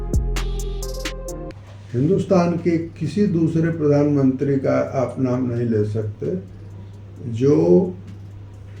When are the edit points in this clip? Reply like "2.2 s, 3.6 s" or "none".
1.5 s